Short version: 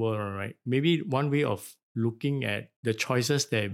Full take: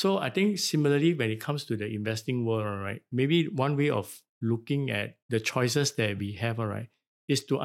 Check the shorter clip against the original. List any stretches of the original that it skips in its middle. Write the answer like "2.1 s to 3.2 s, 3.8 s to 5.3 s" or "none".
none